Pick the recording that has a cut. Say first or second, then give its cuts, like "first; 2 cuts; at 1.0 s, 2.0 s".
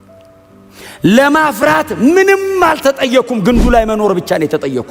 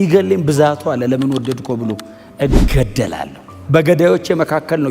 second; 1 cut; at 3.5 s